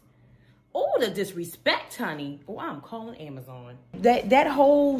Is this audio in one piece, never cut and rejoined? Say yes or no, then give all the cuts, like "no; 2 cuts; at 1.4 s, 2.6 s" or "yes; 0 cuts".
no; 1 cut; at 3.9 s